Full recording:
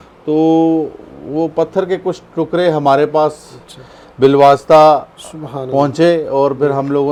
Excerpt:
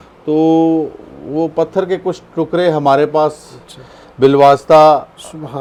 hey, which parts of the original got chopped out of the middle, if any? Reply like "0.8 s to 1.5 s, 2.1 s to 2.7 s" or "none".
none